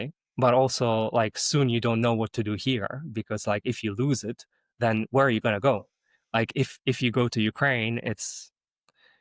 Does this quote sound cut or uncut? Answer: uncut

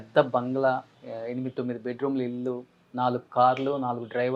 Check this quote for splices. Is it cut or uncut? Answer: cut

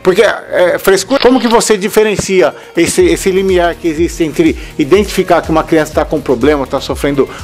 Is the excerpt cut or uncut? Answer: cut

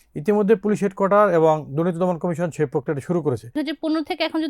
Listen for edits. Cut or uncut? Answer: cut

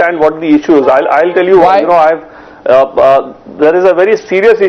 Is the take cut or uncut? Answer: cut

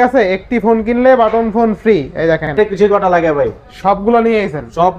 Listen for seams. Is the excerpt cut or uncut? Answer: cut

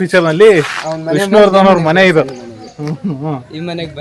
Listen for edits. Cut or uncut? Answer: uncut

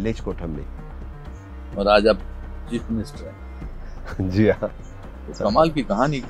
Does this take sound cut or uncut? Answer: uncut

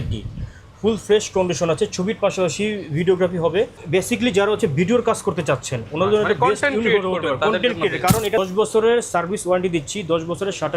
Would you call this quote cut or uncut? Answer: cut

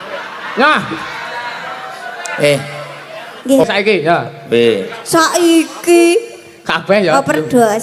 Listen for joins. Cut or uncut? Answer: cut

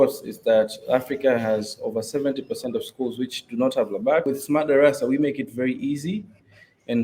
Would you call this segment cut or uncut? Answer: cut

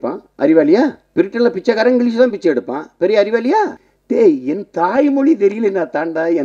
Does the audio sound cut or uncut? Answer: cut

